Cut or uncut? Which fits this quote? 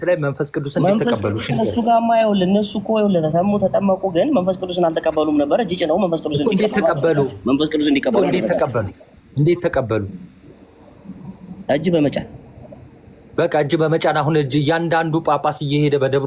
uncut